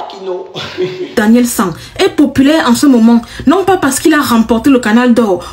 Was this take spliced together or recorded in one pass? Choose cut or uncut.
uncut